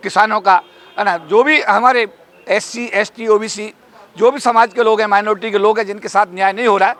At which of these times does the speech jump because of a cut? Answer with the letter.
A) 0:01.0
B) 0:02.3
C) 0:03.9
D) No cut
D